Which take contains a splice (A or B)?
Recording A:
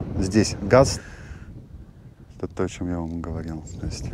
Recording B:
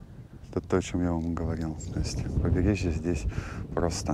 A